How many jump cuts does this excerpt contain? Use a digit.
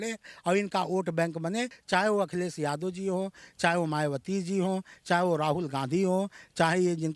1